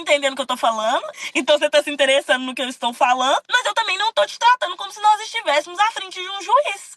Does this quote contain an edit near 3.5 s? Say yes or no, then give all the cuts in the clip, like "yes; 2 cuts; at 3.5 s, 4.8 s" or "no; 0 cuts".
yes; 2 cuts; at 1.1 s, 3.5 s